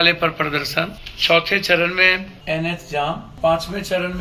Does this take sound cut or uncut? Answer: cut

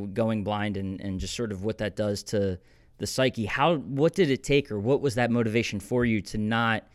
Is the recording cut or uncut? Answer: uncut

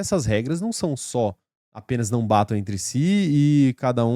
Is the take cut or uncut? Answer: uncut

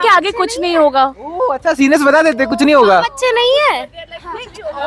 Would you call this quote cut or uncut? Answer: uncut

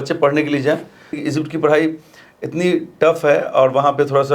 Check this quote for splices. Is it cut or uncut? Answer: cut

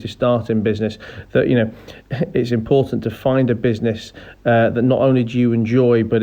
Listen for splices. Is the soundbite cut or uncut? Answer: uncut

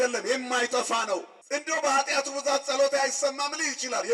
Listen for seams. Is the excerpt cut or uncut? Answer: cut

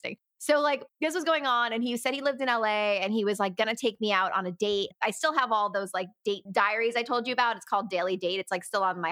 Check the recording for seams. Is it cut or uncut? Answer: uncut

